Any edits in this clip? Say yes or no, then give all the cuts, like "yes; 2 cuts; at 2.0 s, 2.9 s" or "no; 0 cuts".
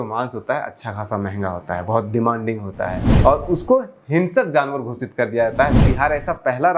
yes; 2 cuts; at 3.0 s, 5.8 s